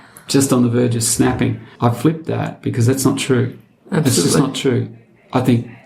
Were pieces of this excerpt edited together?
yes; 1 cut; at 1.6 s

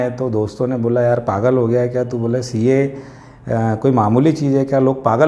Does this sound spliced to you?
no; 0 cuts

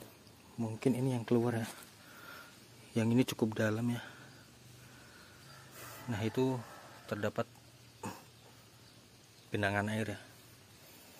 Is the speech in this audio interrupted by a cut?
no; 0 cuts

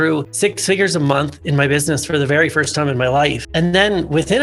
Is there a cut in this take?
no; 0 cuts

